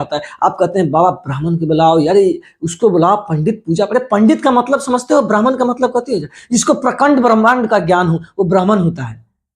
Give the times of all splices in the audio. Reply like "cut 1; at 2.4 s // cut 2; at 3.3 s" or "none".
none